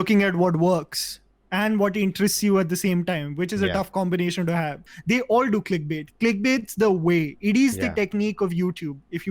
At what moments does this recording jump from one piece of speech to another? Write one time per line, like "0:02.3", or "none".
0:04.9